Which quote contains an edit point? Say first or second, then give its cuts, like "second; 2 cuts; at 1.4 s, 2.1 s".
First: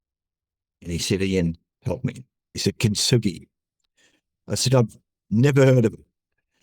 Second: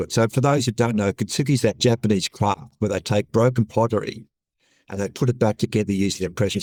first; 1 cut; at 2.6 s